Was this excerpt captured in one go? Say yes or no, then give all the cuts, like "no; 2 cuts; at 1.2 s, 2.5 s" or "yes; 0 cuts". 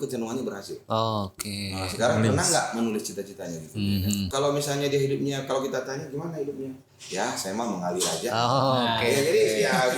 no; 1 cut; at 4.3 s